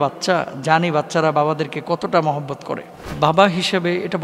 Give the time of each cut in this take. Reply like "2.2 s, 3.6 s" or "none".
3.1 s